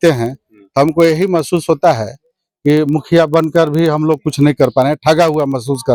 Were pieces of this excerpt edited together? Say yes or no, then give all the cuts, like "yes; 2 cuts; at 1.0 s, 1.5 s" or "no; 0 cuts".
no; 0 cuts